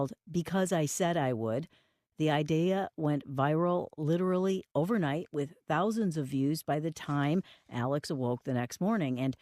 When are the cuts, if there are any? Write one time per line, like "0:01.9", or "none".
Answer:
0:04.9